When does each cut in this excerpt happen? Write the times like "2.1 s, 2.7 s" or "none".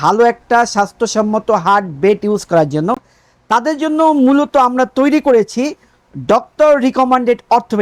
none